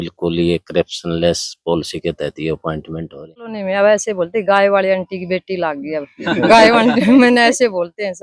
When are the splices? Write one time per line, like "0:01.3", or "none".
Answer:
0:03.6